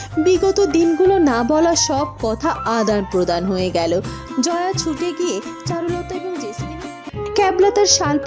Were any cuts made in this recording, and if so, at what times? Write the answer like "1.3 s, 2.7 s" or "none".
7.1 s